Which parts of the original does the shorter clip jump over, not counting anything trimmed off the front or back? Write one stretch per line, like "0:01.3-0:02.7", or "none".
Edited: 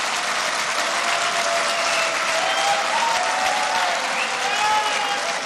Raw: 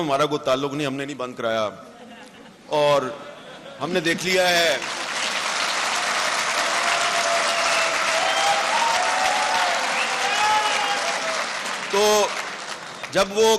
none

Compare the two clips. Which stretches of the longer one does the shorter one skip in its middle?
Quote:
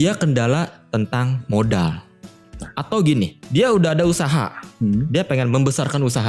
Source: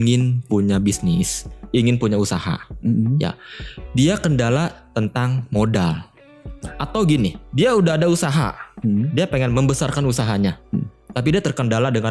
none

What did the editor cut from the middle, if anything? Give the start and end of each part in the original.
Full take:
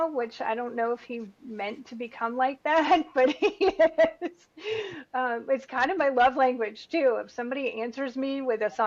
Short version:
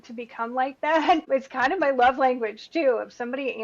0:03.1-0:05.4

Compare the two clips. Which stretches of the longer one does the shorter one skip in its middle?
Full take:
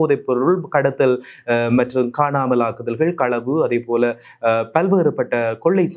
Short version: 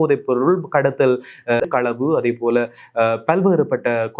0:01.7-0:03.1

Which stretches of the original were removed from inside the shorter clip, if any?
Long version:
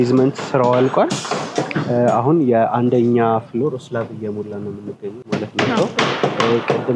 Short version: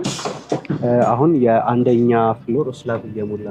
none

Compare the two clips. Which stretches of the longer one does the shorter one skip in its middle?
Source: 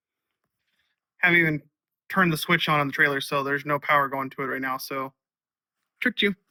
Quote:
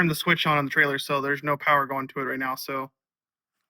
none

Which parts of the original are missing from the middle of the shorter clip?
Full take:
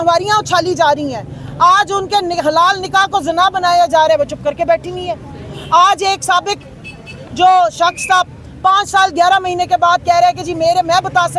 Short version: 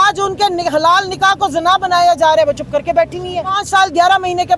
0:05.3-0:08.8

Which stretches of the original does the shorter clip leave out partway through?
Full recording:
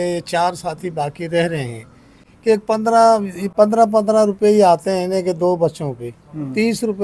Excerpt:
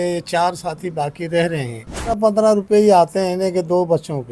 0:02.1-0:03.9

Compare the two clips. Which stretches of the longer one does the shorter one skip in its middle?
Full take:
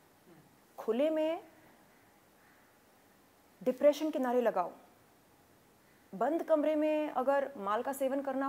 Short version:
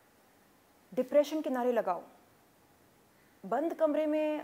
none

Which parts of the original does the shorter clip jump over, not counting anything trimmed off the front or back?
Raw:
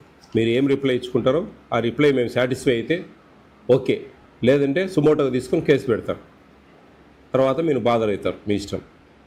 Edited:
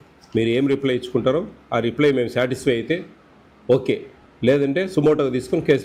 none

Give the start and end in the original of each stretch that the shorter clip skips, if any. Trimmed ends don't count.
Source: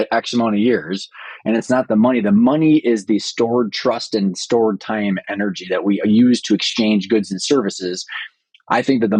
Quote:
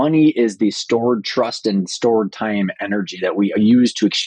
none

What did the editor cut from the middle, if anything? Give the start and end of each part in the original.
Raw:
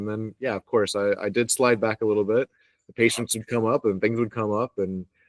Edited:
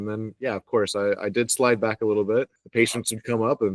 0:02.6-0:02.8

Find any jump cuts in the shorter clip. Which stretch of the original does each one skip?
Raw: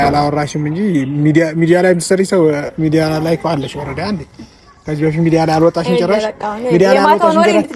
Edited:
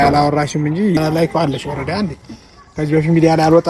0:01.0-0:03.1

